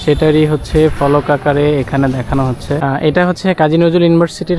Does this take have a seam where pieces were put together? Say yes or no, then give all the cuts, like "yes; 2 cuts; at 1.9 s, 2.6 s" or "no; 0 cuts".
yes; 1 cut; at 2.8 s